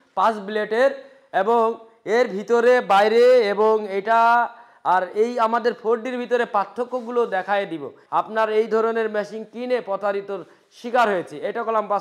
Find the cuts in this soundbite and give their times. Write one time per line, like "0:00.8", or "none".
0:07.9